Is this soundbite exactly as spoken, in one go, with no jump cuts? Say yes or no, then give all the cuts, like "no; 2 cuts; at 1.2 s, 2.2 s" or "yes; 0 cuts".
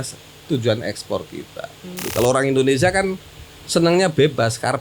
no; 1 cut; at 2.0 s